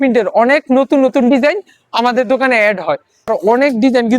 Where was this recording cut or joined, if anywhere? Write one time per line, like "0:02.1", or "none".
0:03.3